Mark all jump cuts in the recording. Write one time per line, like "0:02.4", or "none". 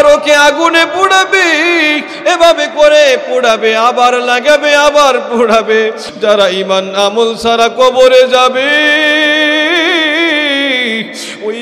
0:06.0